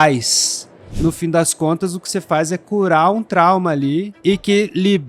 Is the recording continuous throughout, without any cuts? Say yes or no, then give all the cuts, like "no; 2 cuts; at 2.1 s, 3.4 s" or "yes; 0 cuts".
no; 2 cuts; at 0.8 s, 4.2 s